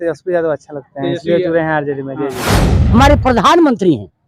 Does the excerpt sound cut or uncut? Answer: cut